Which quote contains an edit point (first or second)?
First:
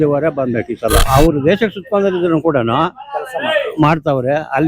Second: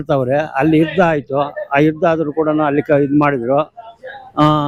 first